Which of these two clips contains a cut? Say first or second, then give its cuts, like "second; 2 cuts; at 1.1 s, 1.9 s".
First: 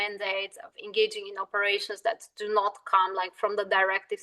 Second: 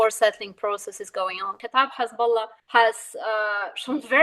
second; 2 cuts; at 1.6 s, 2.6 s